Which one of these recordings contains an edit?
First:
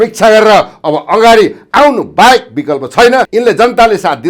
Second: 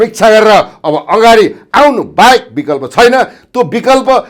first; 1 cut; at 3.3 s

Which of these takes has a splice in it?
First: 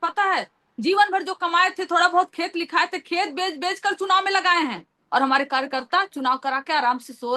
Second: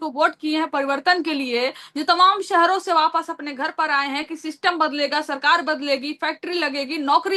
first; 1 cut; at 4.9 s

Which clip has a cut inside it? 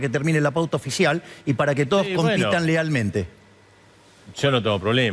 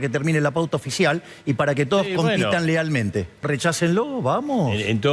second; 1 cut; at 3.5 s

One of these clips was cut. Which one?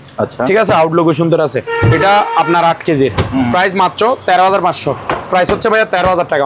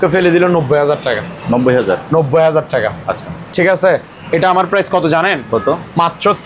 first; 1 cut; at 5.1 s

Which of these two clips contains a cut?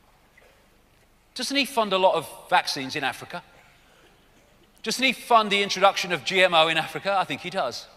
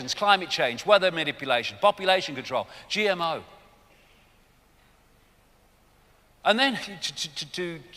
second; 1 cut; at 1.4 s

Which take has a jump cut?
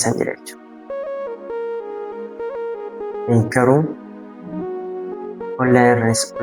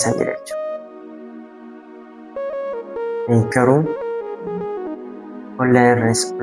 first; 2 cuts; at 0.9 s, 3.2 s

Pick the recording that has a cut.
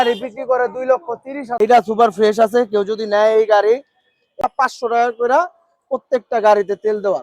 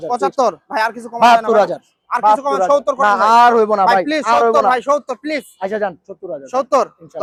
first; 2 cuts; at 1.5 s, 4.4 s

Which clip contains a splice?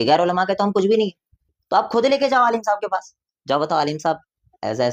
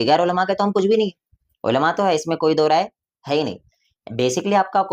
first; 1 cut; at 1.5 s

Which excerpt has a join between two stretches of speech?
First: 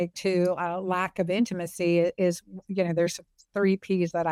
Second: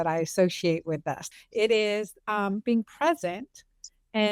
second; 1 cut; at 1.3 s

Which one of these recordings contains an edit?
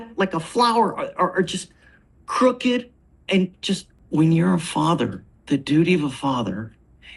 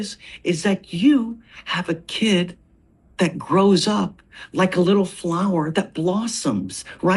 first; 2 cuts; at 3.9 s, 5.3 s

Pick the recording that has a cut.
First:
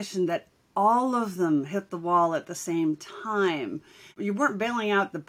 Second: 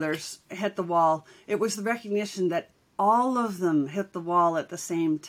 first; 1 cut; at 4.1 s

